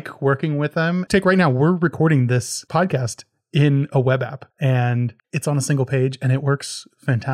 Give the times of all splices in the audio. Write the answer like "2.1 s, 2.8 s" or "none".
1.0 s, 2.6 s, 4.4 s, 5.2 s